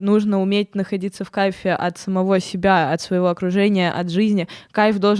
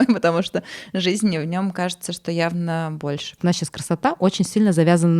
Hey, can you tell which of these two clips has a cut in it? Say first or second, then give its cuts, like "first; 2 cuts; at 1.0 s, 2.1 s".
second; 1 cut; at 3.4 s